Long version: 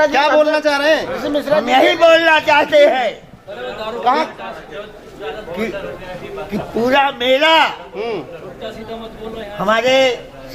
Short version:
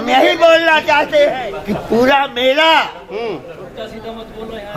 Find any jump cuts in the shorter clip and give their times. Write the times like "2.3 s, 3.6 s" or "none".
1.5 s